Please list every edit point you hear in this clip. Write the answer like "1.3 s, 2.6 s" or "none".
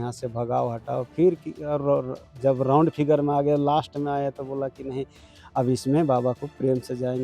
none